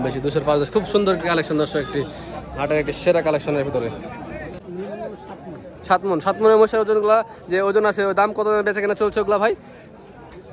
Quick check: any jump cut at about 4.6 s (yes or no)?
yes